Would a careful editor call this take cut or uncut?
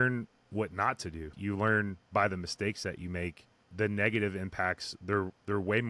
cut